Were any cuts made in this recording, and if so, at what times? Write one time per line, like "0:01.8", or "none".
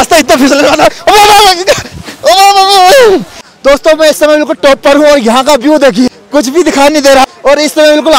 0:03.5
0:06.2
0:07.2